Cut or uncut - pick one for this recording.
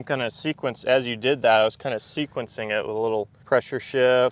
cut